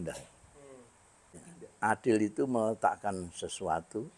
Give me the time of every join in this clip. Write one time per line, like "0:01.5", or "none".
0:01.5